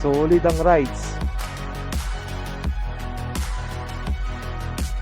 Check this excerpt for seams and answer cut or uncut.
cut